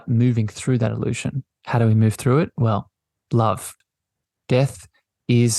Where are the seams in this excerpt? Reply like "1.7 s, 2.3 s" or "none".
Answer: 3.7 s